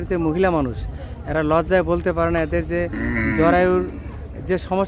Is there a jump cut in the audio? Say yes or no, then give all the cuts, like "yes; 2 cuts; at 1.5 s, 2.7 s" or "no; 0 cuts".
no; 0 cuts